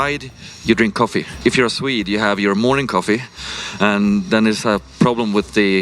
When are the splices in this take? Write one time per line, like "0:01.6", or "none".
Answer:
0:01.3

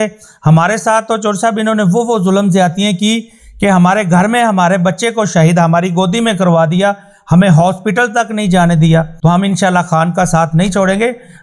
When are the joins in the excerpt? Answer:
0:09.1

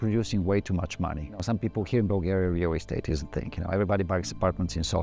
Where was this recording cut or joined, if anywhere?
0:01.4

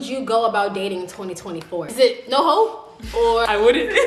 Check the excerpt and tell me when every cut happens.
none

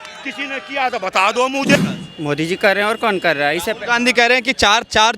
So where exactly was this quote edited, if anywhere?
0:01.8

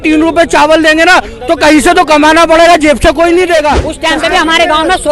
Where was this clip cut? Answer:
0:03.9

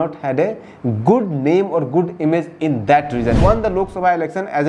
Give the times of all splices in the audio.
0:03.4

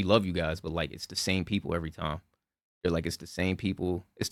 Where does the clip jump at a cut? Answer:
none

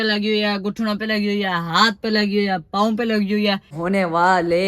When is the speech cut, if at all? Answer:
0:03.8

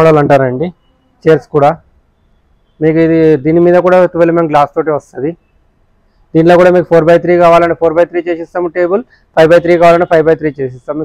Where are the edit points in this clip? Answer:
none

